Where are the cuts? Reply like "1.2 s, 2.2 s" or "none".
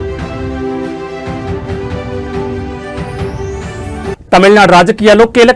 3.8 s